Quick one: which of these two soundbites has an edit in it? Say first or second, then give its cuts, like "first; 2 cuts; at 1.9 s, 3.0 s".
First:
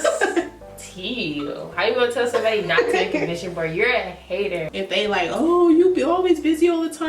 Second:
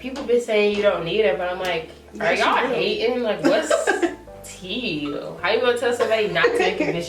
first; 1 cut; at 4.7 s